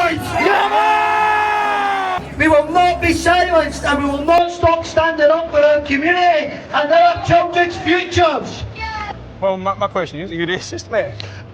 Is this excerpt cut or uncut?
cut